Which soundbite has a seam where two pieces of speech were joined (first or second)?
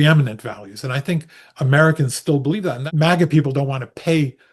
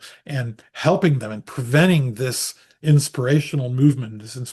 first